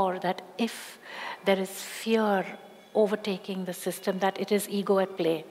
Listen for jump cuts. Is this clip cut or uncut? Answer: uncut